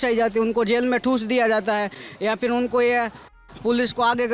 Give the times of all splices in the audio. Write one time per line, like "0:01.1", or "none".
none